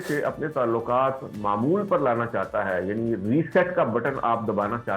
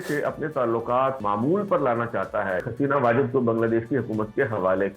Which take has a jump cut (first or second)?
second